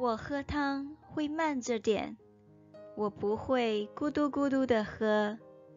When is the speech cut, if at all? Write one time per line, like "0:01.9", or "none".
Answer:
none